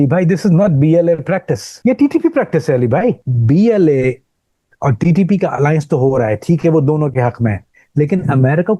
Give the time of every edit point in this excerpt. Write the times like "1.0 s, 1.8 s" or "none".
1.6 s, 3.3 s